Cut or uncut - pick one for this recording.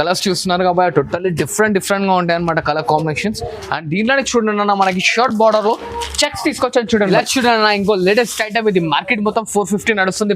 cut